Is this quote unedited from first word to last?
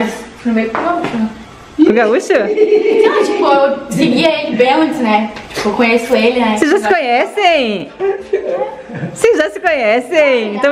no; 1 cut; at 7.7 s

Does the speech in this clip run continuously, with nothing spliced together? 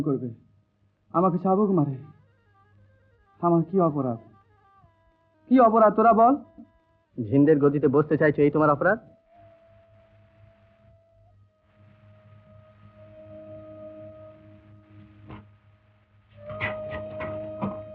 yes; 0 cuts

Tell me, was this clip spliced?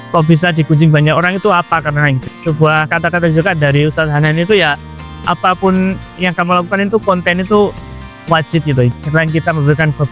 yes; 2 cuts; at 2.3 s, 8.9 s

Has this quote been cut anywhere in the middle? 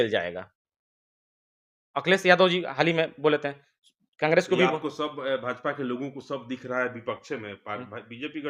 no; 0 cuts

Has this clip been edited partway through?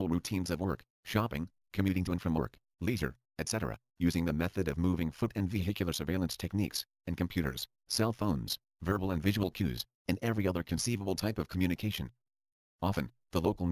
no; 0 cuts

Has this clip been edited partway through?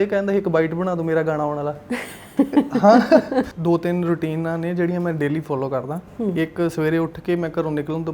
yes; 1 cut; at 3.5 s

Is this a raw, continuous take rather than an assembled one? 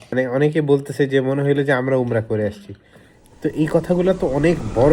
yes; 0 cuts

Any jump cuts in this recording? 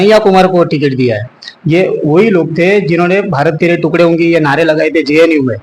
no; 0 cuts

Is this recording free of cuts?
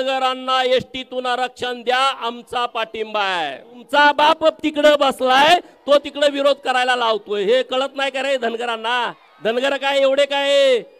no; 2 cuts; at 3.8 s, 9.2 s

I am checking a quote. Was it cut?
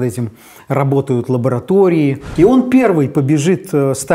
yes; 1 cut; at 2.2 s

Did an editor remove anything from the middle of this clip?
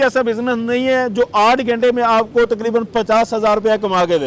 no; 0 cuts

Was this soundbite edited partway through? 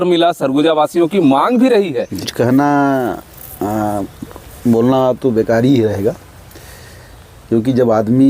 yes; 1 cut; at 2.2 s

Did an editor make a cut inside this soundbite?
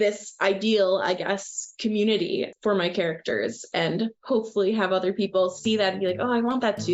no; 0 cuts

